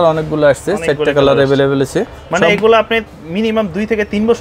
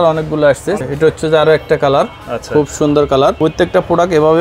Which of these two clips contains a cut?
second; 2 cuts; at 0.8 s, 3.4 s

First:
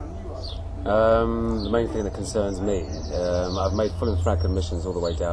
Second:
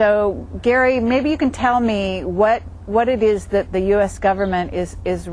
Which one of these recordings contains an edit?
first; 1 cut; at 2.8 s

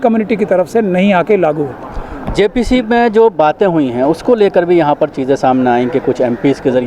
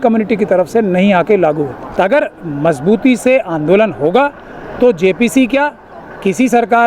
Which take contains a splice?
second; 1 cut; at 1.8 s

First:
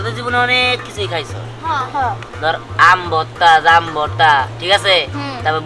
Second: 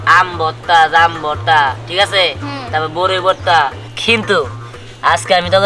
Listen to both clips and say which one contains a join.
second; 1 cut; at 3.9 s

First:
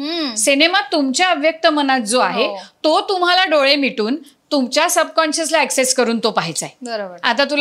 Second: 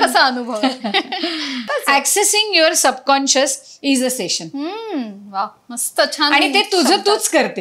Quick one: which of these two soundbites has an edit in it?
second; 1 cut; at 1.7 s

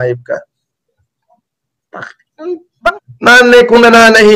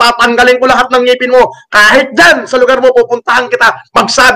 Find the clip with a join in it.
first; 1 cut; at 3.1 s

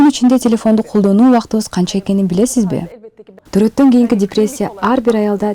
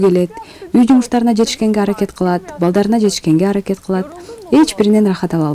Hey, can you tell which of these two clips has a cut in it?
first; 1 cut; at 2.9 s

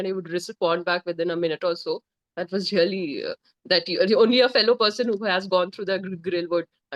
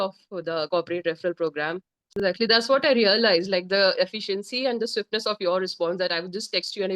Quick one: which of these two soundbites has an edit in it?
second; 1 cut; at 2.0 s

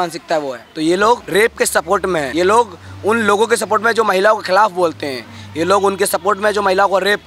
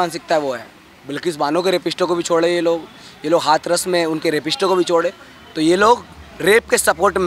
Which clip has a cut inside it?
first; 2 cuts; at 1.0 s, 2.3 s

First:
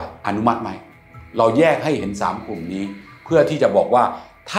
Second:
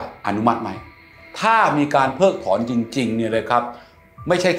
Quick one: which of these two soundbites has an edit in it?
second; 1 cut; at 1.2 s

